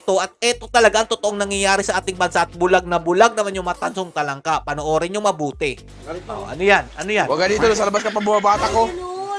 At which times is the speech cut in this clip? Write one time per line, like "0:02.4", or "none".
none